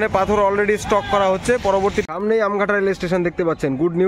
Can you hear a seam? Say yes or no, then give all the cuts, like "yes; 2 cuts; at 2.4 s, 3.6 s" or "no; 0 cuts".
yes; 1 cut; at 2.0 s